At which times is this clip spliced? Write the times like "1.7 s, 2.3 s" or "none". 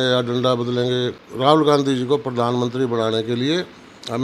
1.2 s